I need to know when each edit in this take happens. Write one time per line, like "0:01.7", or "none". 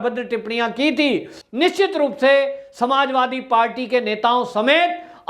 0:01.4